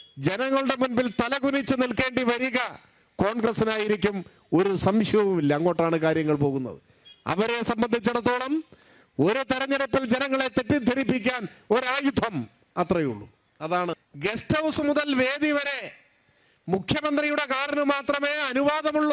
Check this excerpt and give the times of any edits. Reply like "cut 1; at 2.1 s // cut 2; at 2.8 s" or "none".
cut 1; at 14.1 s

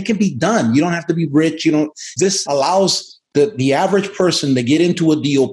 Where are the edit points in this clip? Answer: cut 1; at 2.2 s

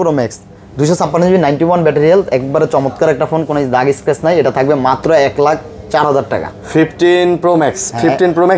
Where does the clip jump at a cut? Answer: none

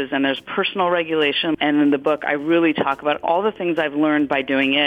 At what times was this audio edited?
cut 1; at 1.5 s // cut 2; at 3.2 s

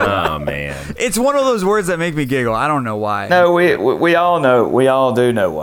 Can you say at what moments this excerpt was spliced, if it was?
cut 1; at 3.3 s

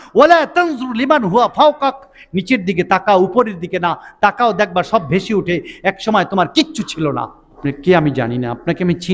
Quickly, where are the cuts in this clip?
cut 1; at 7.4 s

